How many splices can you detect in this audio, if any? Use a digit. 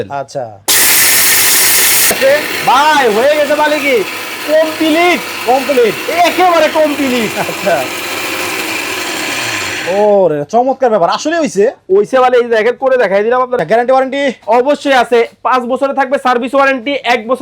2